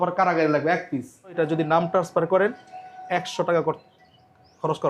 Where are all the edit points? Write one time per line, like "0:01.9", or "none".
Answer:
0:01.4